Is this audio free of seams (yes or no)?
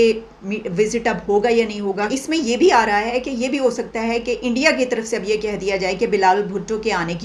yes